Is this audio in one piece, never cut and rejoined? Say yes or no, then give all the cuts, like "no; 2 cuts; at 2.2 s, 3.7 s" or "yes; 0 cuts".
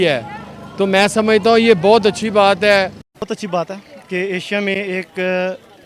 no; 1 cut; at 3.0 s